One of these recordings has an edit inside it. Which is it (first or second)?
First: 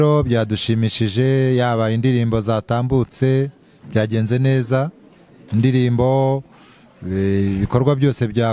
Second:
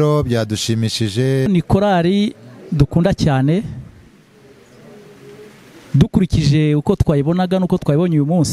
second